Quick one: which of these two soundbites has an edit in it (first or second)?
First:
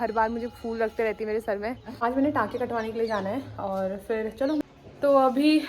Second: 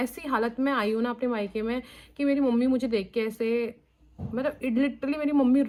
first